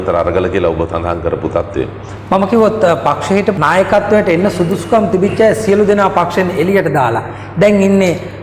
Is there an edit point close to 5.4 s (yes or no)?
no